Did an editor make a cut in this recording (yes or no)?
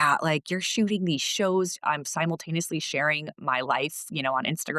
no